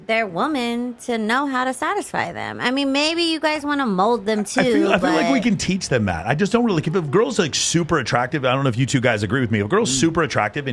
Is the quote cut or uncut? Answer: uncut